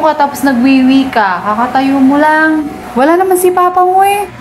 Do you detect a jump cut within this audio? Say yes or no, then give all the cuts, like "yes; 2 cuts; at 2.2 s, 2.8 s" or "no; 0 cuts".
yes; 1 cut; at 2.8 s